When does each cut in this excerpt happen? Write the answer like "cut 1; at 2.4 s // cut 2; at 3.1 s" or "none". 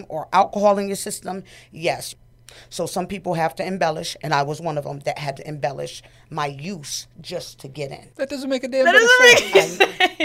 cut 1; at 2.1 s // cut 2; at 8.0 s // cut 3; at 8.9 s